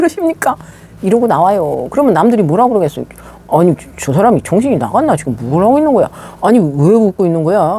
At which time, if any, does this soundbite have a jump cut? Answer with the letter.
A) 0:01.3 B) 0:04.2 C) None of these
C